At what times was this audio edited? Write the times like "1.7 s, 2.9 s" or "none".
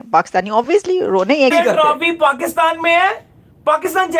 1.5 s